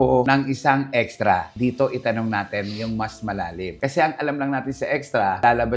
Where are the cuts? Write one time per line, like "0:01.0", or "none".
none